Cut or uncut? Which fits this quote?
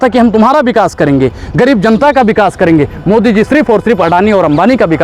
uncut